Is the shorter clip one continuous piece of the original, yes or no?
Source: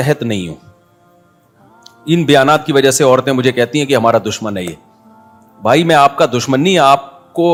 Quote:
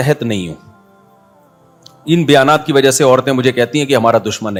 yes